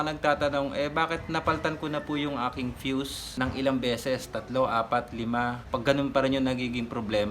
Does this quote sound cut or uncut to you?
cut